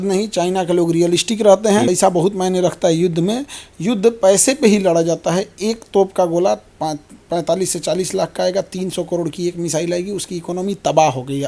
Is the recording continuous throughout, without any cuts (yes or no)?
no